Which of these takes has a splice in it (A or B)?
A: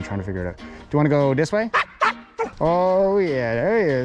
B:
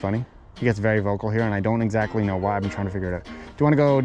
A